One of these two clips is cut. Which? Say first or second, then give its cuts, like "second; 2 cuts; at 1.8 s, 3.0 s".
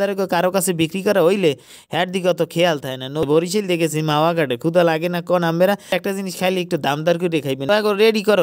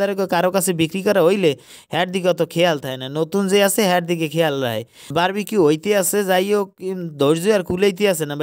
first; 3 cuts; at 3.3 s, 6.0 s, 7.7 s